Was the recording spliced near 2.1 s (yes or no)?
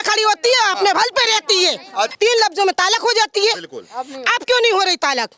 yes